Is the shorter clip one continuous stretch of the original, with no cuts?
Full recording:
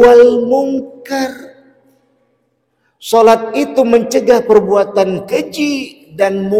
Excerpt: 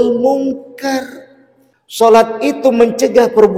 no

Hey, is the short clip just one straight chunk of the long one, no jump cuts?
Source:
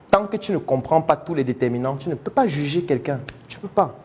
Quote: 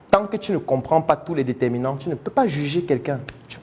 yes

